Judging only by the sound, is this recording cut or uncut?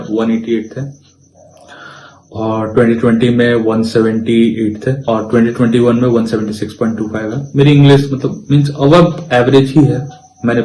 uncut